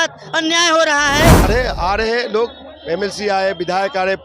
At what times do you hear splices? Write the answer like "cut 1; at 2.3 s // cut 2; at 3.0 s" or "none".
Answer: cut 1; at 1.4 s